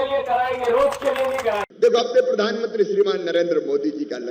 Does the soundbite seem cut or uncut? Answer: cut